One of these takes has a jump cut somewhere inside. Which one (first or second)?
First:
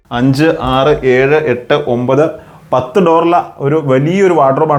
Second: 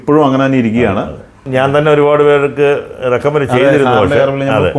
second